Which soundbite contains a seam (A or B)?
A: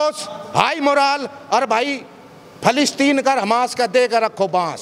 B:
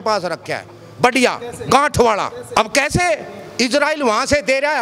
B